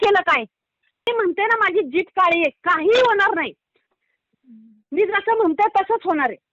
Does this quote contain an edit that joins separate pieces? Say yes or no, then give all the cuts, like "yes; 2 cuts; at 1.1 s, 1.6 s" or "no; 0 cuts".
yes; 1 cut; at 1.1 s